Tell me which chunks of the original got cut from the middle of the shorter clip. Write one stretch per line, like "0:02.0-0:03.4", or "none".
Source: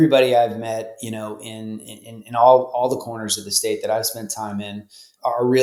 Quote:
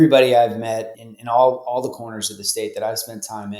0:01.0-0:02.1